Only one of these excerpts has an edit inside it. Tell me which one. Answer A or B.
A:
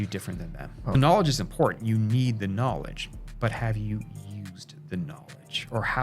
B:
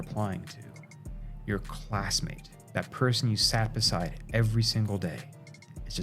A